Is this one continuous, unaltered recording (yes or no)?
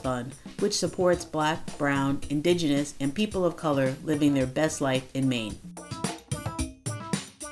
no